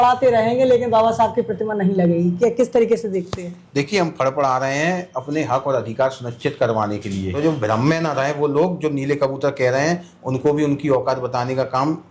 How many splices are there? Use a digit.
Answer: 1